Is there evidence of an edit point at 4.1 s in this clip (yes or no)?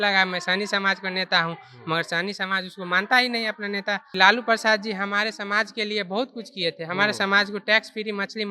yes